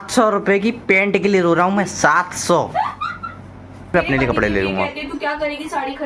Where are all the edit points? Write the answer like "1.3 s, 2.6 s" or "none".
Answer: 3.9 s